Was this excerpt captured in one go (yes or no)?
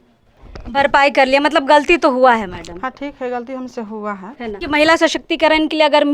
no